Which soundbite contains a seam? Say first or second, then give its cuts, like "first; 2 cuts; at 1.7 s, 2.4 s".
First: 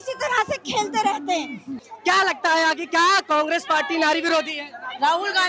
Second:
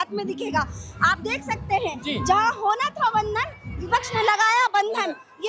first; 1 cut; at 1.8 s